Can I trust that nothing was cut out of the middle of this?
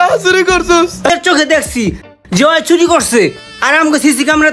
no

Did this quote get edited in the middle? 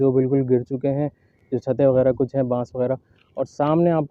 no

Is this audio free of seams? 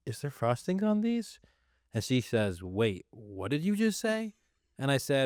yes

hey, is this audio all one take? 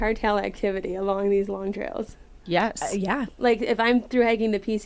yes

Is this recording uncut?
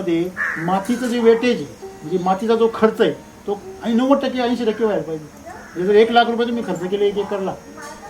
yes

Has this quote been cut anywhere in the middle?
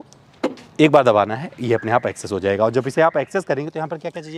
no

